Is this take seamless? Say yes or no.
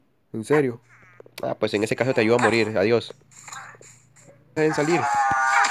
no